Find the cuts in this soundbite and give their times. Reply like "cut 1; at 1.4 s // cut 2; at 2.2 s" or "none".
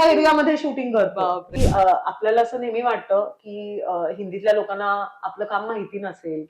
cut 1; at 1.5 s